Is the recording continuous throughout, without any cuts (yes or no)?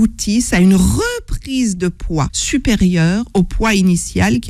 no